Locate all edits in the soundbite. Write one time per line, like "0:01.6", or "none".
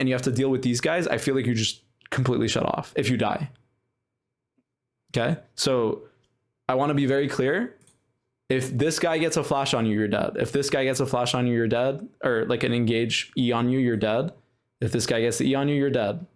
none